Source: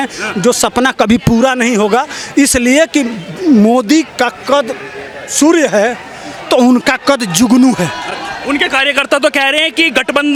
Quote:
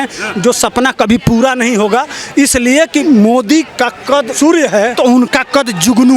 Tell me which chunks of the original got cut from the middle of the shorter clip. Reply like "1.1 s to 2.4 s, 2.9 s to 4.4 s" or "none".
3.0 s to 3.4 s, 4.7 s to 5.3 s, 5.9 s to 6.5 s